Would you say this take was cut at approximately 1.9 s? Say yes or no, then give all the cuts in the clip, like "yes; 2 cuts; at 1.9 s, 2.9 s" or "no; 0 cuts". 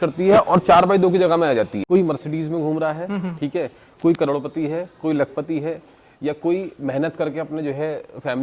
yes; 1 cut; at 1.9 s